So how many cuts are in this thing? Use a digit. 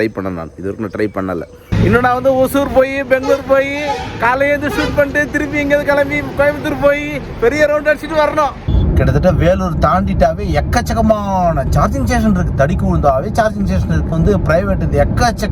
3